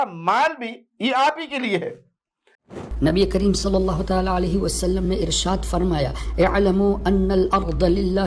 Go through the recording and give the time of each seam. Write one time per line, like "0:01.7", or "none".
0:02.8